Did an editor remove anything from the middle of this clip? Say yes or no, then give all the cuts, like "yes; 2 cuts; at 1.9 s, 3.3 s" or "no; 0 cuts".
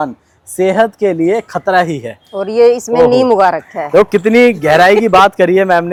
no; 0 cuts